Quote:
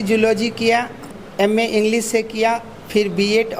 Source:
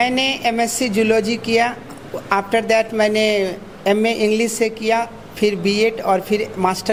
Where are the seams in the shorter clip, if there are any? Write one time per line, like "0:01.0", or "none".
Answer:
0:01.2